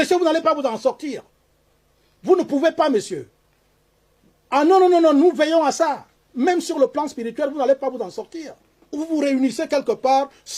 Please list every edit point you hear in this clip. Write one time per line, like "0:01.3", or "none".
0:09.0